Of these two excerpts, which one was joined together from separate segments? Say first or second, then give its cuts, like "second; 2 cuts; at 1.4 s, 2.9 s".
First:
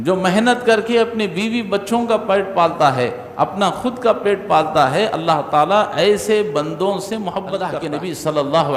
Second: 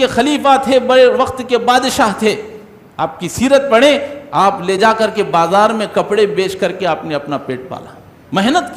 first; 1 cut; at 7.8 s